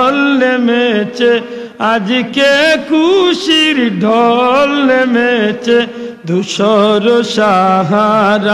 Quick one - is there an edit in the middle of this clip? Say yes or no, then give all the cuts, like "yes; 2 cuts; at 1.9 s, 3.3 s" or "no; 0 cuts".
no; 0 cuts